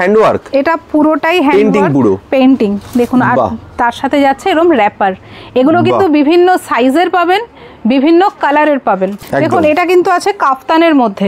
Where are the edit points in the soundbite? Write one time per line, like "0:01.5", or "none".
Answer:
0:09.1